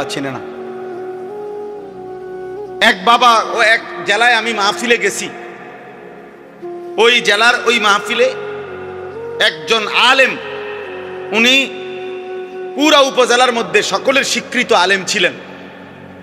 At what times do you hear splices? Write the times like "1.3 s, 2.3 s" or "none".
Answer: none